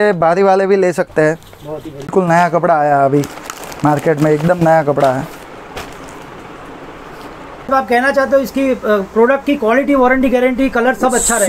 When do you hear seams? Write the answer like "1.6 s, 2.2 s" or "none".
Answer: 2.1 s, 7.7 s

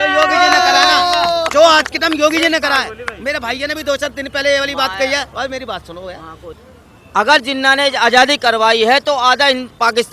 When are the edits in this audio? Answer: 6.5 s

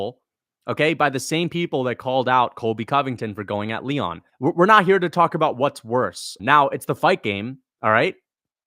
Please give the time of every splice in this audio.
4.2 s, 6.3 s, 7.6 s

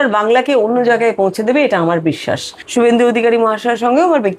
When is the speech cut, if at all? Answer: 2.5 s

